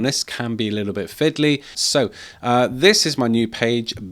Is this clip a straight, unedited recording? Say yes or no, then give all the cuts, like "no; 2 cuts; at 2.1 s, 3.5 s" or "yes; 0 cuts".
no; 1 cut; at 1.8 s